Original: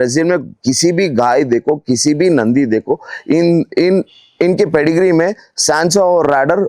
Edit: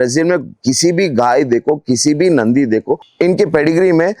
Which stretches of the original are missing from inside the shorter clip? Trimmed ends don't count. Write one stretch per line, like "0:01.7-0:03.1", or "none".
0:03.0-0:04.2